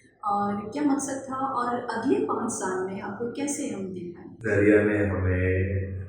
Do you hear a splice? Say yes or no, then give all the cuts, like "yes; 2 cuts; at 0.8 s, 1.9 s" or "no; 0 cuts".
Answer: yes; 1 cut; at 4.2 s